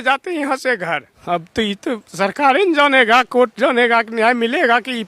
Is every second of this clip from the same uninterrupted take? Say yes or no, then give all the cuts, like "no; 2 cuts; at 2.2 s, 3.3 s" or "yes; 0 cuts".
no; 1 cut; at 1.1 s